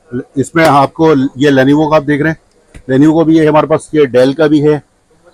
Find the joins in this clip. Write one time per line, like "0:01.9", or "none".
none